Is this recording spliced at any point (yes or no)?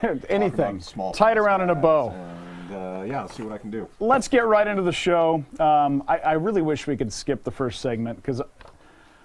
no